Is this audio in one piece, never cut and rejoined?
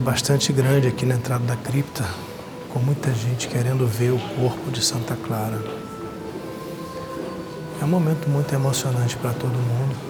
yes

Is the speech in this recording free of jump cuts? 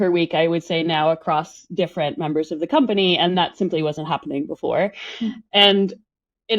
yes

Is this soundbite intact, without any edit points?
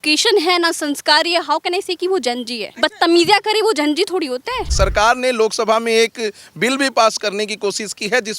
no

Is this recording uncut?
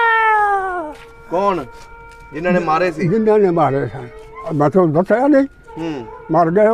no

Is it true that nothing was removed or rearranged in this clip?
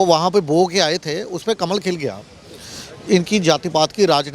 yes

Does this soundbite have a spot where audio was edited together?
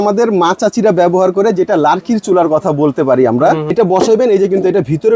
yes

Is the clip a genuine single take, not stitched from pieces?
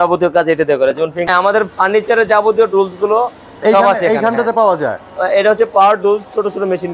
no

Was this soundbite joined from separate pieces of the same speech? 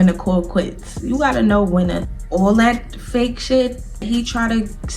yes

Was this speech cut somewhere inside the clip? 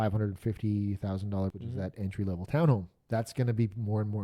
yes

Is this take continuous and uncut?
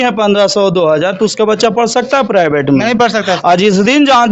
yes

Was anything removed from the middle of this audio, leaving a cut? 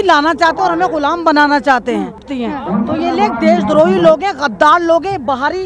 yes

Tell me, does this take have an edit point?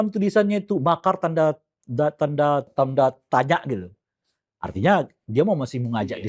yes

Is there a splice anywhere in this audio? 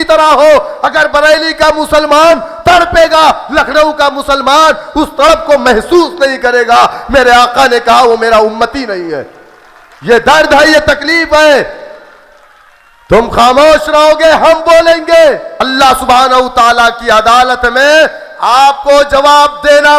yes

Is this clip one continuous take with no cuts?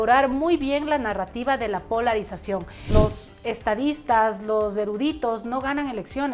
no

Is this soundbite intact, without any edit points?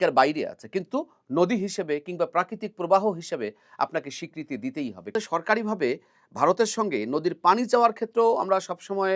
no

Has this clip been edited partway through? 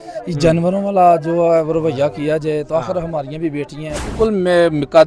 yes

